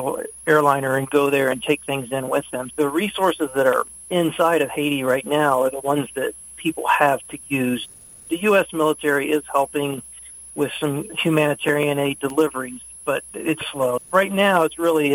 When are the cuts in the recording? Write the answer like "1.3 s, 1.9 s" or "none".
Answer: 2.6 s, 7.9 s, 11.1 s, 14.0 s